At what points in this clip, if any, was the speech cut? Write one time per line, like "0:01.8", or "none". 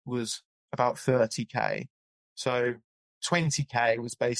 none